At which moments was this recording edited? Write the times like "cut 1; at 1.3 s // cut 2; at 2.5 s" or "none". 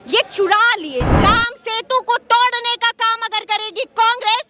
cut 1; at 1.1 s